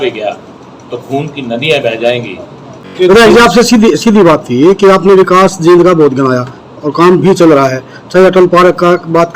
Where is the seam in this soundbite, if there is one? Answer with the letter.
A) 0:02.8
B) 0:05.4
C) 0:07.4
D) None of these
A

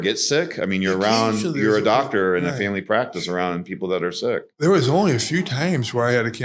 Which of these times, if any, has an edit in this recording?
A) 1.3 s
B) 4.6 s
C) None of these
C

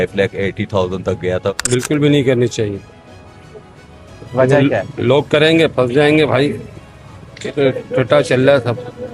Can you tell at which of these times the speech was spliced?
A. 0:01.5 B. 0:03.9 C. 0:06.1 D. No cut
A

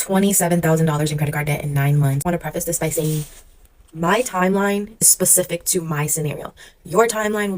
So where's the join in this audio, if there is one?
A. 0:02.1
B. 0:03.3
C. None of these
C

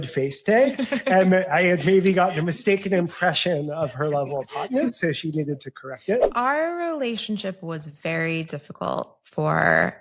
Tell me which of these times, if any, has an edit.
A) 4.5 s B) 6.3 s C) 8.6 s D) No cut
B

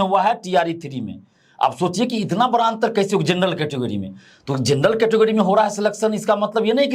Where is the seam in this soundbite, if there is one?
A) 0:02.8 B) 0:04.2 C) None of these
C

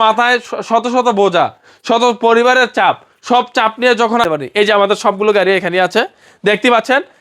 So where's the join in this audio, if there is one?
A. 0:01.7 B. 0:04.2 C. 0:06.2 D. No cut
B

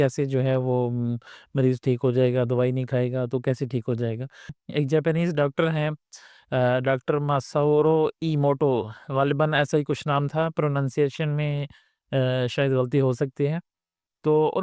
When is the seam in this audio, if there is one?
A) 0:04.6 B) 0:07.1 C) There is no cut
A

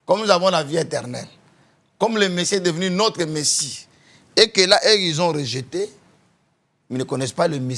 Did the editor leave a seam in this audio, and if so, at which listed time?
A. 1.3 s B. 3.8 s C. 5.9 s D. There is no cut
D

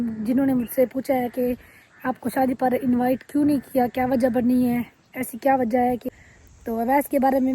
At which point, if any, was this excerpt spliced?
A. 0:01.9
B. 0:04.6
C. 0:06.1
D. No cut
C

